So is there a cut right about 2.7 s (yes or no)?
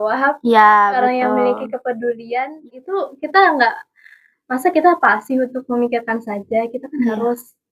yes